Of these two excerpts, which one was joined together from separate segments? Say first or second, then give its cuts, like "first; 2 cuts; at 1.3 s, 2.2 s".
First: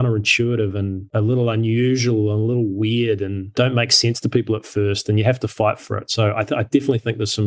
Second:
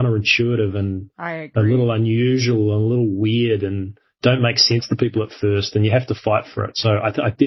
first; 2 cuts; at 1.0 s, 3.4 s